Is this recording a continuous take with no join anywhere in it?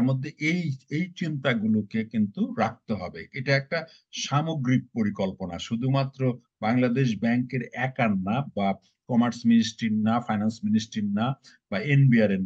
yes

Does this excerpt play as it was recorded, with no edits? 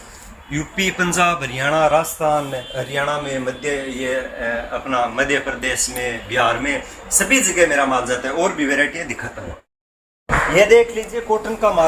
yes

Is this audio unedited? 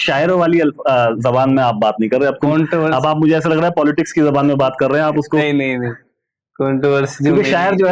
yes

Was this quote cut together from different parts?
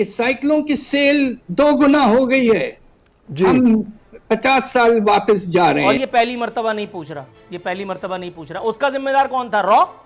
yes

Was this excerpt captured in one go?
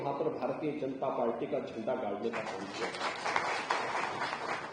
yes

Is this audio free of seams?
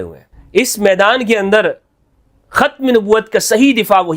yes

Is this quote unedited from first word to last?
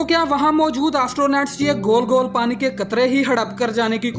yes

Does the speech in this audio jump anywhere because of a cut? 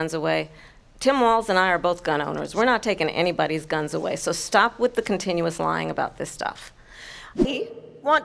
no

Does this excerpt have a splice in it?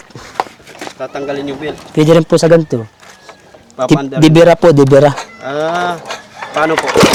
no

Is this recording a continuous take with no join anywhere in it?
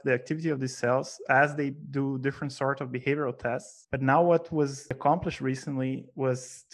no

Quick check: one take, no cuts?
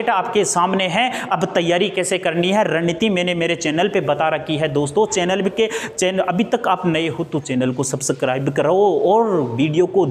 yes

